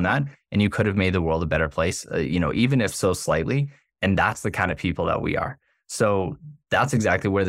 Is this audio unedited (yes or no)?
yes